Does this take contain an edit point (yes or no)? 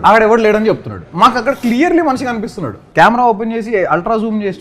yes